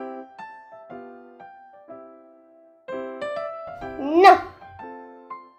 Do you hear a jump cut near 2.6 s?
no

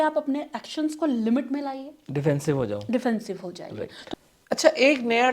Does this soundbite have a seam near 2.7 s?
no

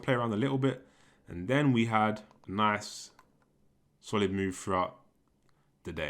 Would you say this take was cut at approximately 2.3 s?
yes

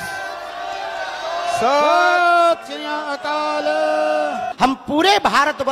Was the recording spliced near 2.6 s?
no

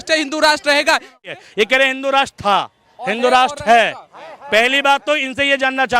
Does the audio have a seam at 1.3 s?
yes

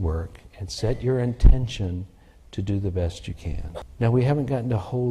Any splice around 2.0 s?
no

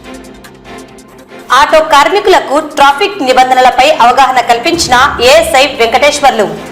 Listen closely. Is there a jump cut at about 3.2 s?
no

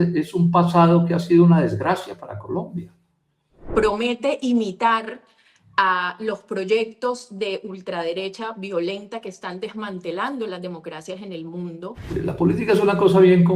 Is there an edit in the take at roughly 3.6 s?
yes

